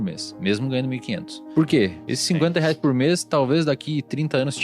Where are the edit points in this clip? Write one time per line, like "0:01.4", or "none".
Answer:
0:01.4
0:02.1

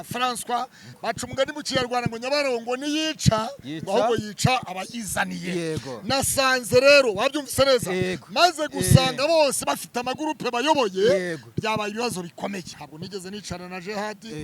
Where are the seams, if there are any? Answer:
0:00.9
0:12.7

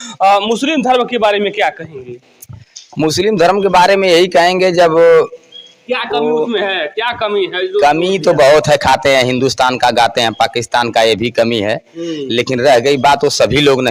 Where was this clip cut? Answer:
none

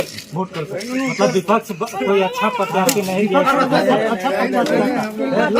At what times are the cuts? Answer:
none

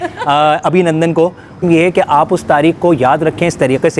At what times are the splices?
0:01.6

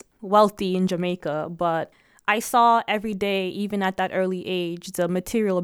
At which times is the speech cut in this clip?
0:01.9

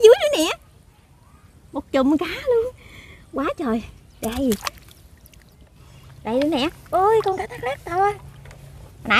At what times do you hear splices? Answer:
0:05.7

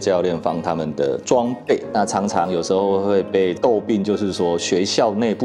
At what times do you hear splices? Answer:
0:01.9
0:03.5

